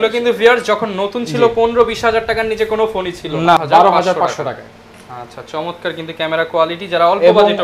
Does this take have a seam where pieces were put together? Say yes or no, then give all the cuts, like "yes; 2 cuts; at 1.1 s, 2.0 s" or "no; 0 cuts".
yes; 1 cut; at 3.6 s